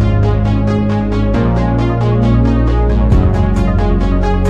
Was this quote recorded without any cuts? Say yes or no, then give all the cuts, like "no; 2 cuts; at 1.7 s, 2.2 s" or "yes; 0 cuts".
yes; 0 cuts